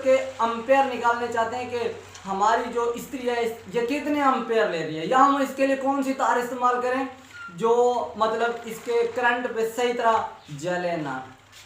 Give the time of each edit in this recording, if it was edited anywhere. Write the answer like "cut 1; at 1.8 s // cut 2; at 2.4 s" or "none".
none